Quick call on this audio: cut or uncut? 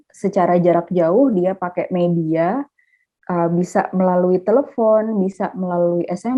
uncut